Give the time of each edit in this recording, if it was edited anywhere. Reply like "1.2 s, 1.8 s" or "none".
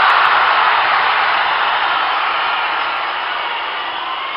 none